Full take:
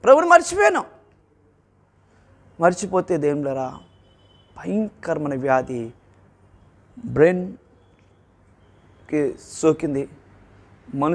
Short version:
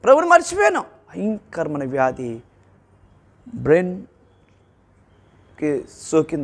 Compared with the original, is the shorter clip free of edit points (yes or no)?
no